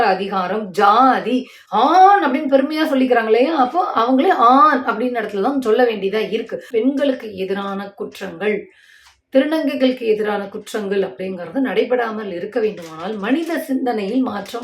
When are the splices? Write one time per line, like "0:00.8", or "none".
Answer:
0:01.6
0:06.7